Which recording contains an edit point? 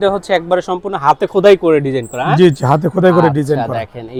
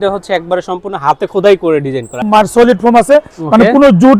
second; 1 cut; at 2.2 s

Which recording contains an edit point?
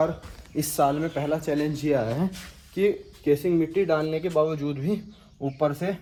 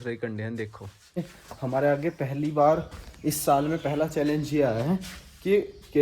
second; 1 cut; at 1.2 s

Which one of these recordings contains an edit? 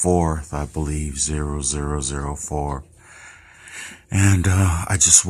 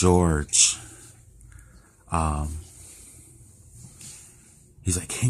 second; 1 cut; at 2.3 s

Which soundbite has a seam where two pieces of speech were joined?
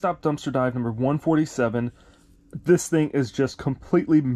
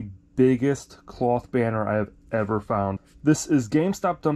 second; 1 cut; at 3.0 s

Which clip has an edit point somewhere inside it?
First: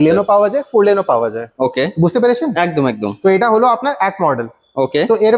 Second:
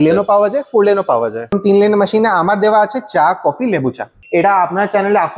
second; 2 cuts; at 1.5 s, 4.1 s

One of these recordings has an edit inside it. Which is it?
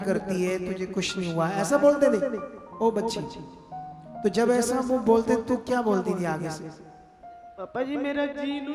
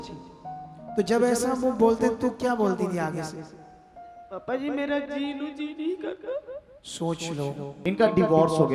second; 1 cut; at 7.7 s

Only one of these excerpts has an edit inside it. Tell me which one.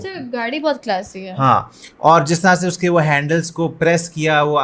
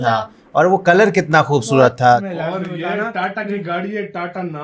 second; 1 cut; at 2.3 s

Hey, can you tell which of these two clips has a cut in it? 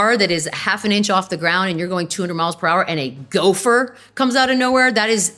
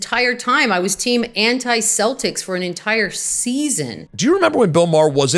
second; 1 cut; at 4.0 s

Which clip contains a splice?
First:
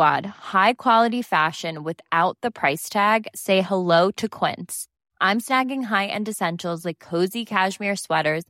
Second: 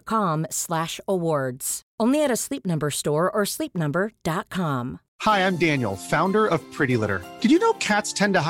second; 1 cut; at 5.0 s

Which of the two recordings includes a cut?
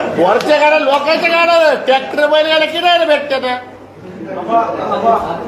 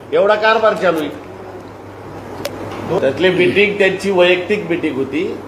second; 1 cut; at 3.0 s

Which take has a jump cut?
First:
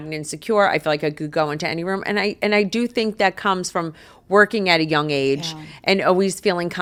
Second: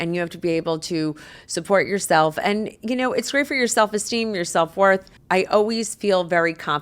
second; 1 cut; at 5.1 s

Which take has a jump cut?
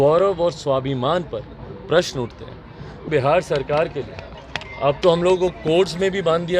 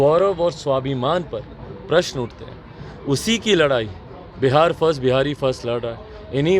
first; 1 cut; at 3.0 s

